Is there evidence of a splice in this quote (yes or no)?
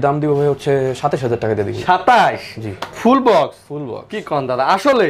no